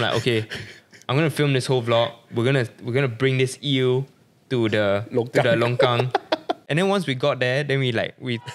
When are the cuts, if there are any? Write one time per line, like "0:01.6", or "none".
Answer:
0:06.6